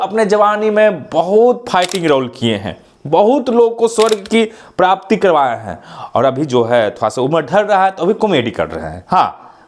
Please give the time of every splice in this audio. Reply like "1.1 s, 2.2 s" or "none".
none